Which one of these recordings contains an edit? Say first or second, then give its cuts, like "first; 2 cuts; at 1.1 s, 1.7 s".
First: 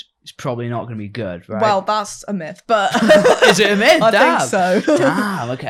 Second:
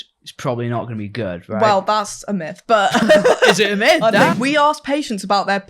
second; 1 cut; at 4.3 s